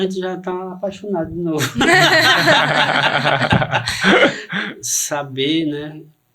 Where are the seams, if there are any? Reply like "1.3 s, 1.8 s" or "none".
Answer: 4.5 s

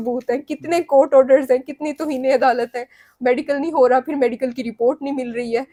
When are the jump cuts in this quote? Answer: none

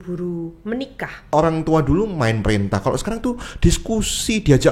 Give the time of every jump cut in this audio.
1.3 s

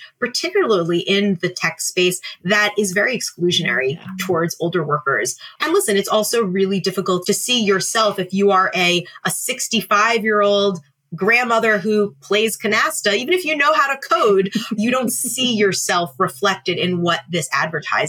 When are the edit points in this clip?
5.5 s, 7.2 s, 14.7 s

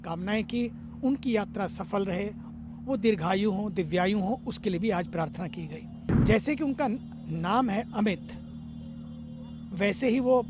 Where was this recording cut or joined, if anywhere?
6.0 s

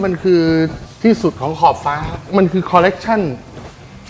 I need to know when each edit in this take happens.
2.2 s

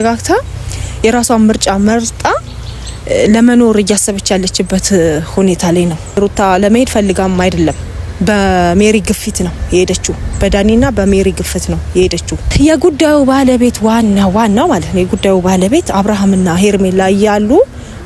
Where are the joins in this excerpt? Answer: 6.2 s, 12.5 s

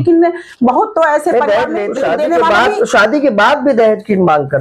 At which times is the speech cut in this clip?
1.8 s

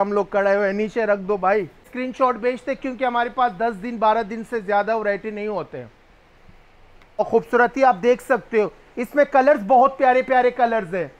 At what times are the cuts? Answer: 1.9 s, 7.2 s

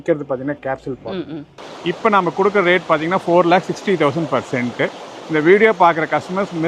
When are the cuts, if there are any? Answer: 1.6 s, 5.0 s

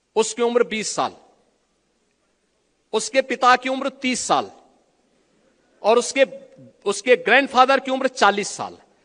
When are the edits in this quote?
none

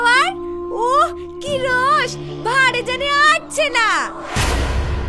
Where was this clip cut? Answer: none

